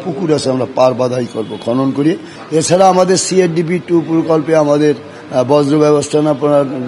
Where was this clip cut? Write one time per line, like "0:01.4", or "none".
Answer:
0:02.3